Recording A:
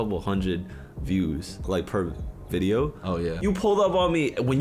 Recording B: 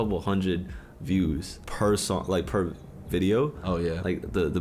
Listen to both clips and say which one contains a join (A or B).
A